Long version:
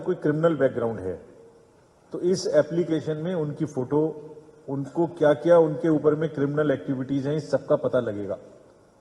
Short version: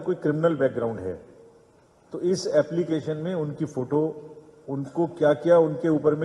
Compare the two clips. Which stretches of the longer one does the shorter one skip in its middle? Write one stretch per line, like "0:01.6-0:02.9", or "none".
none